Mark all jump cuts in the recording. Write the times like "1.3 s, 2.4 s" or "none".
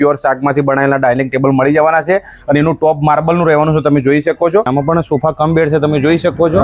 4.7 s